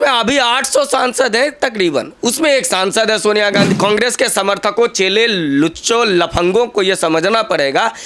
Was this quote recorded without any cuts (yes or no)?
no